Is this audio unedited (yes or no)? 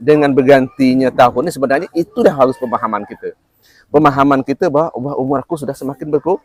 yes